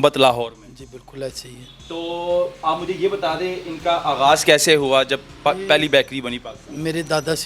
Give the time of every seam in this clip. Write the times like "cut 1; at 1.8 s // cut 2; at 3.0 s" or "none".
none